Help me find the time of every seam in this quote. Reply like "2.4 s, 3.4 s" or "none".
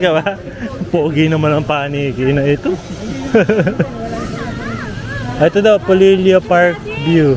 none